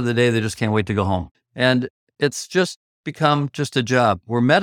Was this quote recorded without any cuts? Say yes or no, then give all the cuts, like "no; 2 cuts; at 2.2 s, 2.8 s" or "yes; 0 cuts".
no; 2 cuts; at 1.4 s, 2.0 s